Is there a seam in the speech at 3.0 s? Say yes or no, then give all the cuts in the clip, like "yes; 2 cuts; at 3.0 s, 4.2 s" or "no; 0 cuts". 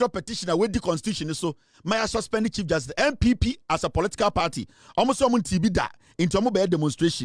no; 0 cuts